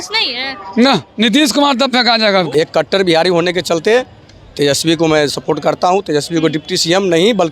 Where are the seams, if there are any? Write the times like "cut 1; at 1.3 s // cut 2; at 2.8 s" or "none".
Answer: cut 1; at 2.5 s

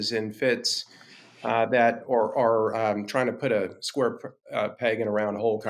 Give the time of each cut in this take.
none

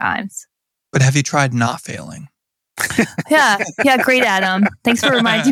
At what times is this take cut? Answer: none

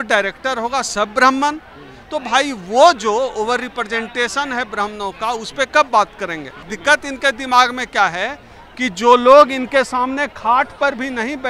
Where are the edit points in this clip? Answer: cut 1; at 6.6 s

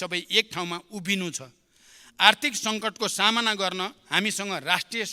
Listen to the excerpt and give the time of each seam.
none

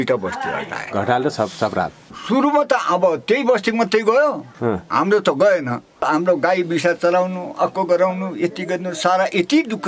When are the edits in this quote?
cut 1; at 2.0 s // cut 2; at 6.0 s

